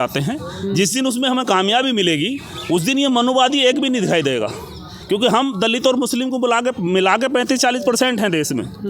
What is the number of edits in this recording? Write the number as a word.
zero